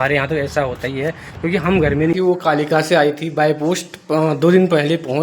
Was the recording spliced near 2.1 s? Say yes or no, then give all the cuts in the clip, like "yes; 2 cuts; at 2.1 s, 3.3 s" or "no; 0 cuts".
yes; 1 cut; at 2.1 s